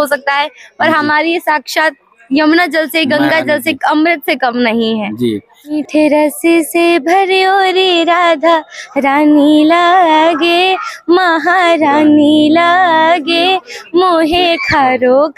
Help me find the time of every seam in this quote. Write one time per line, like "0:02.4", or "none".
0:05.8